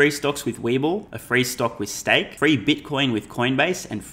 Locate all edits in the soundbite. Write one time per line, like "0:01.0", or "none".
0:01.1
0:02.3